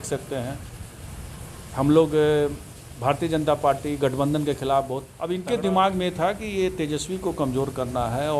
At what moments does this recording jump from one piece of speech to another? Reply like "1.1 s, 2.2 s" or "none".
5.1 s